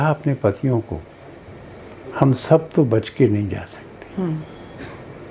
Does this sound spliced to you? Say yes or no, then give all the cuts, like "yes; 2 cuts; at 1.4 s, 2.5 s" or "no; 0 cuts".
no; 0 cuts